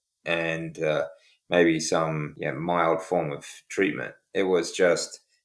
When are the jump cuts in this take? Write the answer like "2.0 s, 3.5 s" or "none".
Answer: 2.3 s